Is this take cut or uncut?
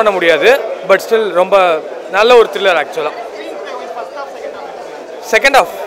uncut